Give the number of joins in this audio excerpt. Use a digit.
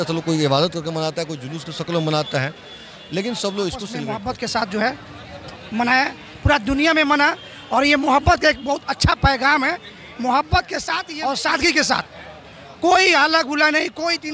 2